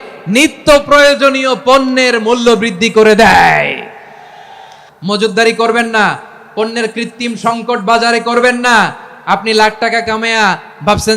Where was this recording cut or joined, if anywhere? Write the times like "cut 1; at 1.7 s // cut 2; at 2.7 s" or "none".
cut 1; at 4.8 s